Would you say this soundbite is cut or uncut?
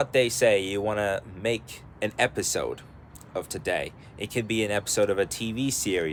uncut